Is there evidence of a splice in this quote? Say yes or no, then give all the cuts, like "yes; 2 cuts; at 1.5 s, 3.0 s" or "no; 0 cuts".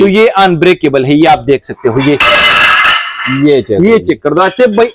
no; 0 cuts